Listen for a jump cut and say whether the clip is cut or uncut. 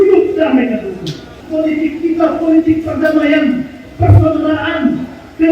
cut